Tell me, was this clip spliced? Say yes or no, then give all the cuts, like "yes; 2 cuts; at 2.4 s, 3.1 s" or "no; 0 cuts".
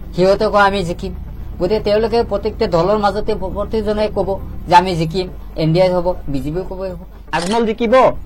yes; 1 cut; at 7.1 s